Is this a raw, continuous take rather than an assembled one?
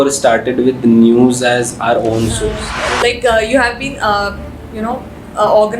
no; 1 cut; at 2.7 s

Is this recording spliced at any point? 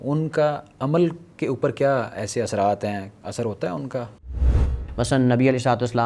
yes; 1 cut; at 4.4 s

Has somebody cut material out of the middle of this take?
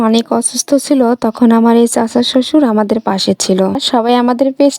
yes; 1 cut; at 3.8 s

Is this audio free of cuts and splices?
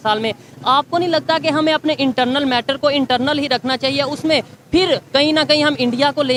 yes; 0 cuts

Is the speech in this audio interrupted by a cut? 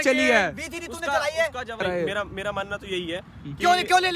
yes; 1 cut; at 1.8 s

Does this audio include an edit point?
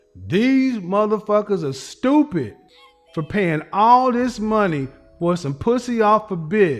no; 0 cuts

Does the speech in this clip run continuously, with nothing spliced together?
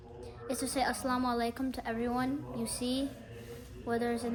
yes; 0 cuts

